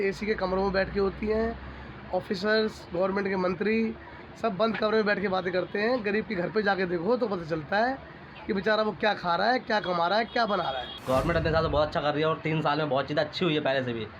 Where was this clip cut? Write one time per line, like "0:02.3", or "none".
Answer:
0:10.9